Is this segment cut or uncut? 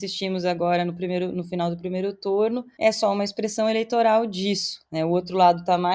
uncut